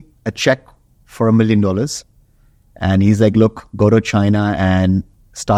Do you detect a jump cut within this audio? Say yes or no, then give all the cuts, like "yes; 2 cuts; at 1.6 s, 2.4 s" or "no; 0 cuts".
no; 0 cuts